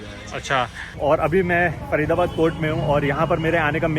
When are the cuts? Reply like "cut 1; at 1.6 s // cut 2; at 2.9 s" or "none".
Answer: cut 1; at 0.9 s